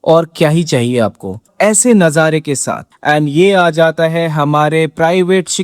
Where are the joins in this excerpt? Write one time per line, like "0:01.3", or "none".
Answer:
0:02.9